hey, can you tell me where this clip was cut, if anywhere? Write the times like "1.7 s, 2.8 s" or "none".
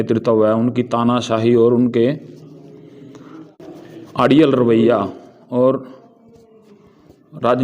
3.6 s